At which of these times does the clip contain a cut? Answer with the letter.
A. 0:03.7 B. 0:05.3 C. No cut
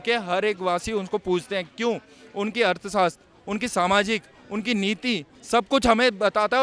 B